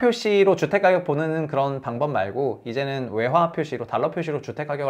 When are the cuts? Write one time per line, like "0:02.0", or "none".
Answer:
none